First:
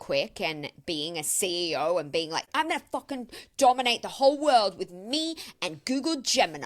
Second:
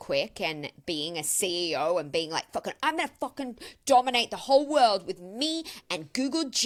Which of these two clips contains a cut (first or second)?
first